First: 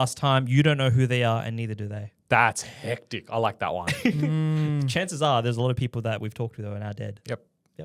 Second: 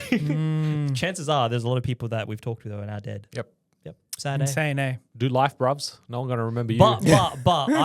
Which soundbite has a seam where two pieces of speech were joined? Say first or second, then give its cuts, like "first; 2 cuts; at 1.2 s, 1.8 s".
second; 1 cut; at 5.0 s